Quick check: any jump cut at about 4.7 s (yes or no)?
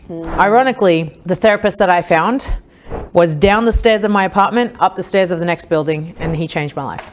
no